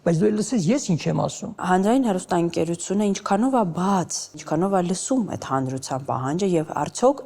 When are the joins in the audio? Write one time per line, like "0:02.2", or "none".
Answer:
0:01.5
0:04.4